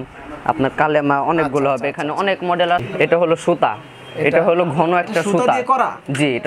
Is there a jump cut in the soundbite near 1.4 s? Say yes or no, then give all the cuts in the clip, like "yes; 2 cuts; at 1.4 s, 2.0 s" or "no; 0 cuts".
no; 1 cut; at 2.8 s